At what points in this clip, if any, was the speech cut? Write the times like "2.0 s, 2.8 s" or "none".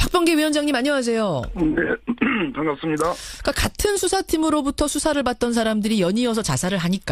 none